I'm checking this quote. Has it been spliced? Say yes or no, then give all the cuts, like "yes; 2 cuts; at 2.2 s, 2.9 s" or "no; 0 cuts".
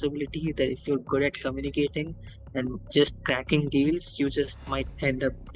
no; 0 cuts